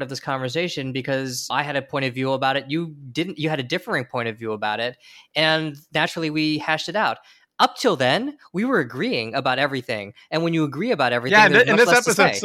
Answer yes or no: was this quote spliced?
no